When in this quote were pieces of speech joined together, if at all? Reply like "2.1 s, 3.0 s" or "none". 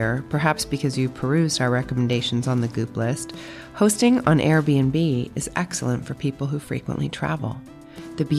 none

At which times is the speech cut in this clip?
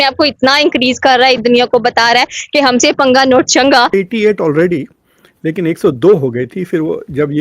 1.4 s, 3.9 s

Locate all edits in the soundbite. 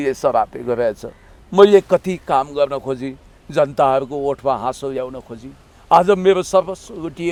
none

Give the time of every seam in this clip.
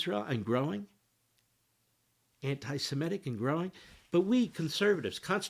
none

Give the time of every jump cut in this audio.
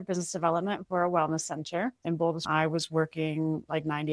2.5 s

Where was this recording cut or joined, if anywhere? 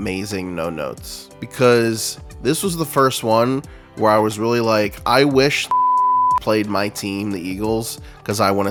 none

